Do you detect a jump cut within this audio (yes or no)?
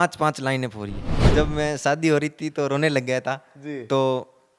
yes